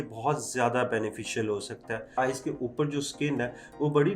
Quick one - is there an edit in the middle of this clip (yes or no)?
yes